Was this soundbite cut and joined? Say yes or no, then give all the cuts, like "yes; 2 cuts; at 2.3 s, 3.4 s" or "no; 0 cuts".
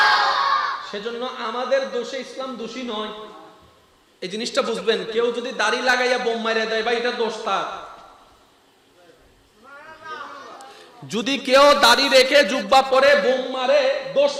no; 0 cuts